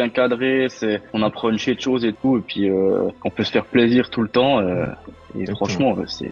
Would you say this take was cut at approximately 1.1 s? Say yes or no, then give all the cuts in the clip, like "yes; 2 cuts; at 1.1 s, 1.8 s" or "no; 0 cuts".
yes; 1 cut; at 1.1 s